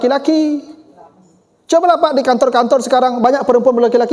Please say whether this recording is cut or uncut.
uncut